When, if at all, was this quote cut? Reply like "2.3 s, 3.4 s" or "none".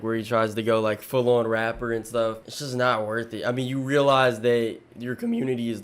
2.5 s